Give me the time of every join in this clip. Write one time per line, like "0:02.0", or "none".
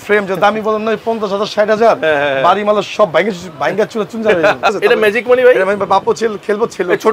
0:04.7